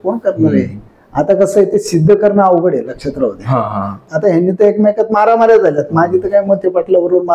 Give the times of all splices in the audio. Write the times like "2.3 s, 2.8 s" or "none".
4.1 s

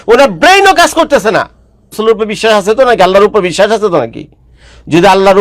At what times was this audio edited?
2.0 s

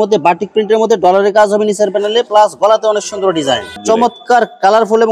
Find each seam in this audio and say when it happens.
3.7 s

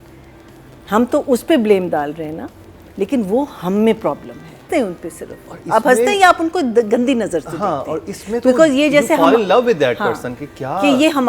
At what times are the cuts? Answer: 4.6 s

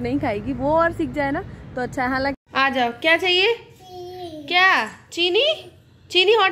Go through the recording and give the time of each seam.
2.4 s

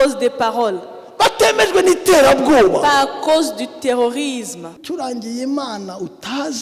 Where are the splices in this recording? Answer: 4.8 s

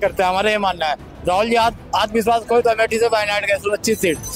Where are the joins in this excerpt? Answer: none

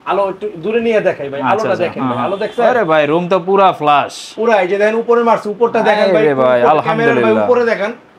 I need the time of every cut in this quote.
none

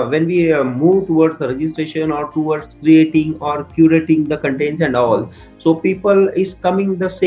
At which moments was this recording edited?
none

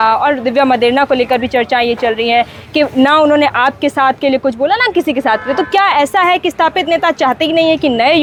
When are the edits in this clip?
none

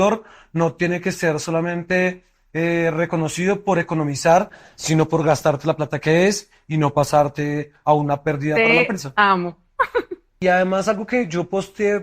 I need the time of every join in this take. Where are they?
10.2 s

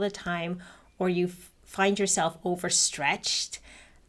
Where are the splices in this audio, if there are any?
none

